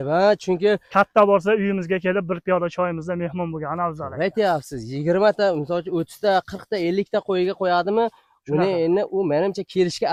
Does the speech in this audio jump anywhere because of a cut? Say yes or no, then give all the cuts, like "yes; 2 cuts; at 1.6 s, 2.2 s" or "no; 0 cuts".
no; 0 cuts